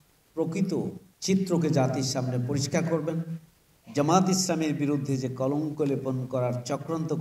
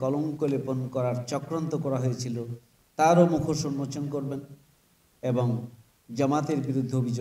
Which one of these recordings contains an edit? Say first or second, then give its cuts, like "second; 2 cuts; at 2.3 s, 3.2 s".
first; 1 cut; at 1.1 s